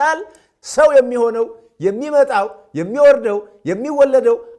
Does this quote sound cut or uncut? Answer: uncut